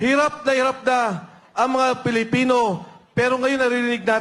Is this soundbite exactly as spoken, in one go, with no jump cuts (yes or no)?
yes